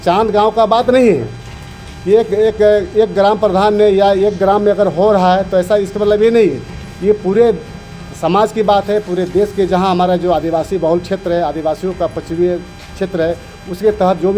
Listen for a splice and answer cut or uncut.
uncut